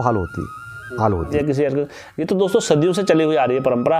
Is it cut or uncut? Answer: cut